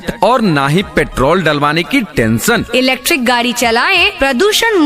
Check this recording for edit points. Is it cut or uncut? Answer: uncut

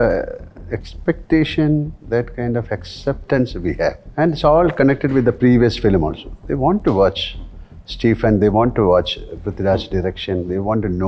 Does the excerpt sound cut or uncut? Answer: cut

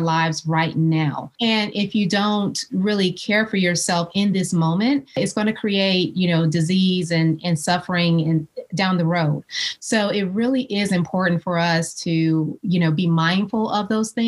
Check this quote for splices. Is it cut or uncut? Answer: cut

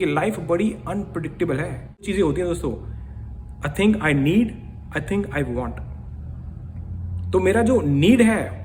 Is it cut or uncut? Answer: cut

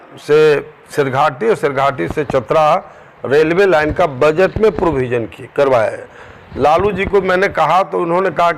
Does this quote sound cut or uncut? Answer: uncut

